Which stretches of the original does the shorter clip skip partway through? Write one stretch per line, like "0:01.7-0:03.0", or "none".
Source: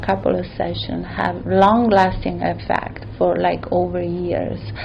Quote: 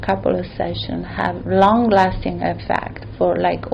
none